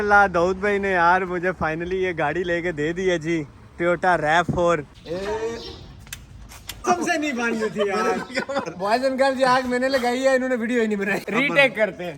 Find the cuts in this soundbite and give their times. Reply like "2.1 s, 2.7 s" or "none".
5.0 s, 6.8 s, 11.3 s